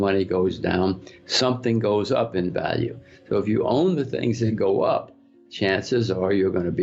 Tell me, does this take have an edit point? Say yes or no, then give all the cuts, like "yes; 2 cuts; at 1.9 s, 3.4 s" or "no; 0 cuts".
no; 0 cuts